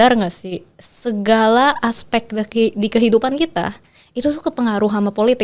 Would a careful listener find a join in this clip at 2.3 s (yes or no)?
no